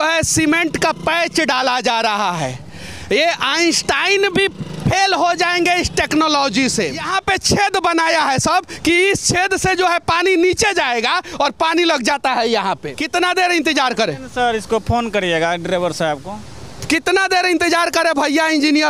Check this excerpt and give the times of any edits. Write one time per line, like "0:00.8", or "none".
0:07.1
0:12.9